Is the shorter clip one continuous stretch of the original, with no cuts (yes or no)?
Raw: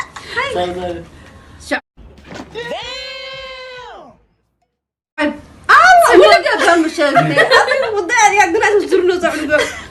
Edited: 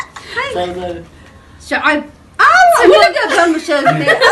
no